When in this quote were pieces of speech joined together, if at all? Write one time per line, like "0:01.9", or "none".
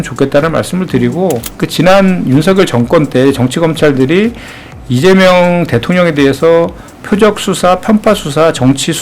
0:01.6